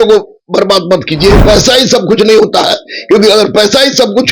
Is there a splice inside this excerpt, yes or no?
yes